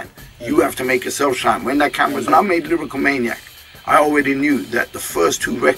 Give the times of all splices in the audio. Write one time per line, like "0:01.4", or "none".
0:02.3